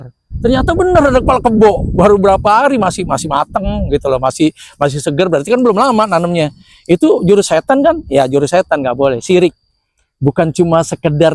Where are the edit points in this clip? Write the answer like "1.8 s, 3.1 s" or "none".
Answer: none